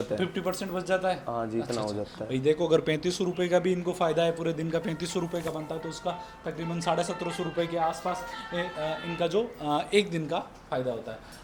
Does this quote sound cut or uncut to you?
uncut